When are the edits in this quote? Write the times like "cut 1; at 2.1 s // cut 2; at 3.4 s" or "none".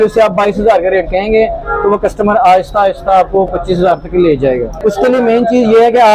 cut 1; at 4.8 s